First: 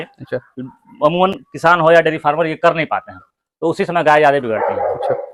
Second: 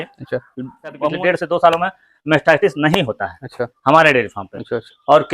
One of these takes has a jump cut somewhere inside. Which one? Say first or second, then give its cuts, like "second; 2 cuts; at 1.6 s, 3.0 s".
second; 1 cut; at 1.0 s